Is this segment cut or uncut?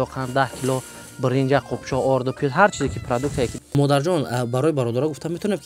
cut